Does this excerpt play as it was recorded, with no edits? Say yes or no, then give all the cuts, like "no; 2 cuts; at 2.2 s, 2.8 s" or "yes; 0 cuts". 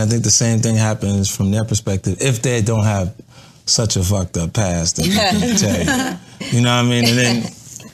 yes; 0 cuts